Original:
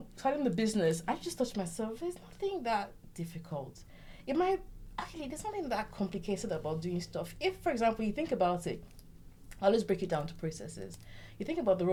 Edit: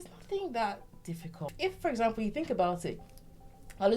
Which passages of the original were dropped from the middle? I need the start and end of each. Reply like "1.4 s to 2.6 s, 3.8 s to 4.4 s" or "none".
3.6 s to 7.3 s

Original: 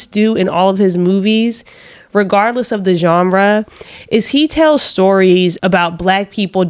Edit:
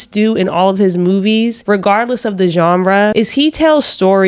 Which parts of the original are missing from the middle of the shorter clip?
1.6 s to 2.0 s, 3.6 s to 4.1 s

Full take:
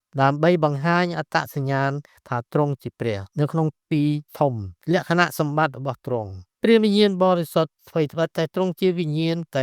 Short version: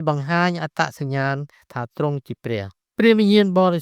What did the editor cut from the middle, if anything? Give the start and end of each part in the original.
3.3 s to 6.4 s

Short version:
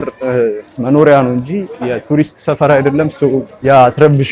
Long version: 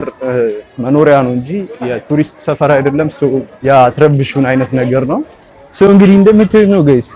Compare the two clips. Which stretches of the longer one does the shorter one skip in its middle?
none

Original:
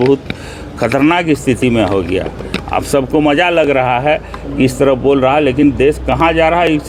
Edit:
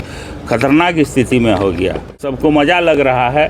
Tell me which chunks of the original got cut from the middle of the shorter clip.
2.6 s to 2.9 s

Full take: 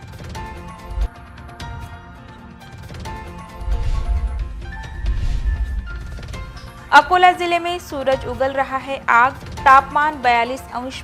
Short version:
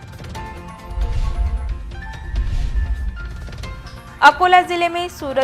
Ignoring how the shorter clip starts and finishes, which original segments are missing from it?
1.0 s to 3.7 s

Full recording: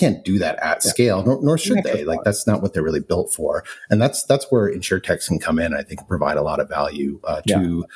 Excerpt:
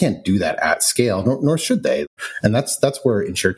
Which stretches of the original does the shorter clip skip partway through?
2.1 s to 3.6 s

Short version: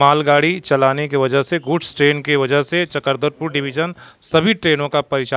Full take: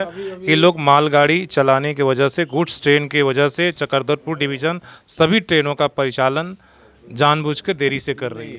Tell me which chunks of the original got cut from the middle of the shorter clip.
none

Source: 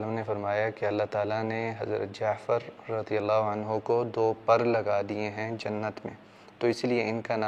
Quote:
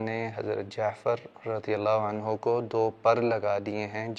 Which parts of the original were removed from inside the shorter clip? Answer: none

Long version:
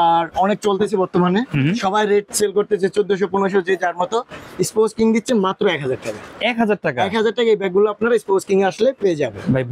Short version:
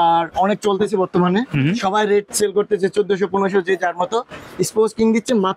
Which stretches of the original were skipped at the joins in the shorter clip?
none

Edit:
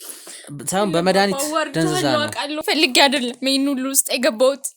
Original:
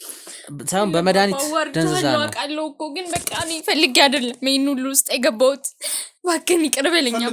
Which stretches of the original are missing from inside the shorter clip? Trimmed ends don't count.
2.6 s to 3.6 s

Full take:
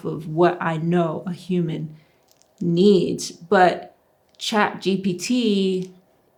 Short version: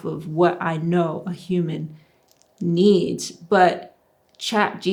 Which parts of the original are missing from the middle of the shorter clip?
none

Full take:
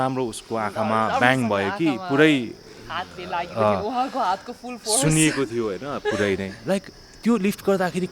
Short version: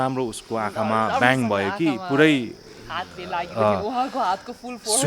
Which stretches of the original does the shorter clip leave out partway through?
none

